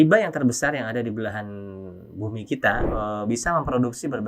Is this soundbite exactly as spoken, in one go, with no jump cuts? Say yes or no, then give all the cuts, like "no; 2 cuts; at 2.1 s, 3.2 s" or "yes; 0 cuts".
no; 1 cut; at 2.8 s